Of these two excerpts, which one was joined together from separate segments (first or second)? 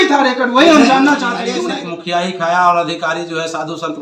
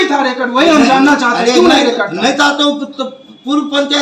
first